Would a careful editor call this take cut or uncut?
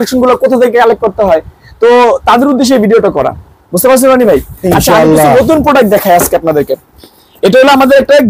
uncut